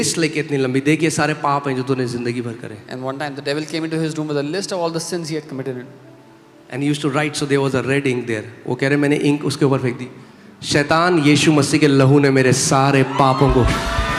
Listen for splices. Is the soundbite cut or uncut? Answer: uncut